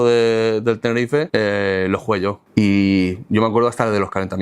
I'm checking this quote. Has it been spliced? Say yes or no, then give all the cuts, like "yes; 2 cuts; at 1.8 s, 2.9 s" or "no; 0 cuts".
yes; 2 cuts; at 1.3 s, 2.4 s